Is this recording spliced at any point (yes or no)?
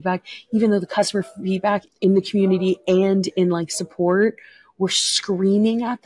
yes